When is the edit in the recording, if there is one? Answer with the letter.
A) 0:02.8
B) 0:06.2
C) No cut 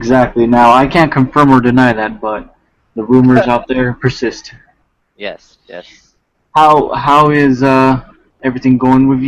B